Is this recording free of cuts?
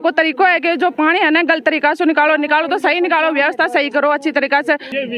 yes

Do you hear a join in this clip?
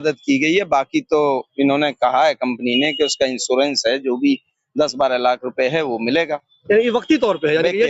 no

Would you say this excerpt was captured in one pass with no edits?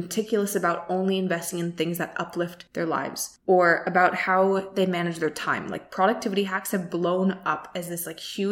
no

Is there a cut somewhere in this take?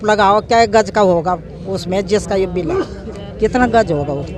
no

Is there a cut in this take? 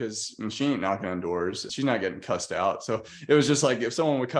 yes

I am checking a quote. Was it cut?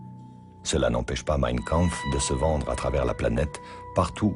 no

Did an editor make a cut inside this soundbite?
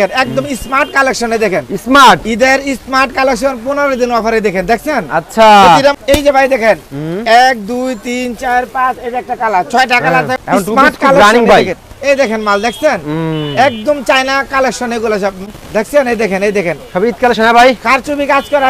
yes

